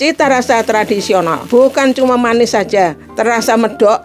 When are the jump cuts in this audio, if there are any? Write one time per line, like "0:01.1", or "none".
0:01.4